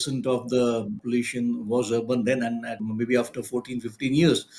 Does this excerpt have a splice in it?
yes; 2 cuts; at 0.9 s, 2.7 s

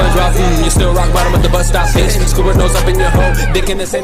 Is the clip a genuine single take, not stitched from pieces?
yes; 0 cuts

